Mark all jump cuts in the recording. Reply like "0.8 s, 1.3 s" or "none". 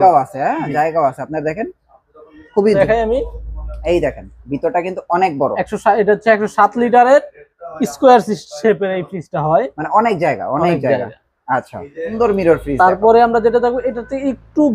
2.8 s, 12.1 s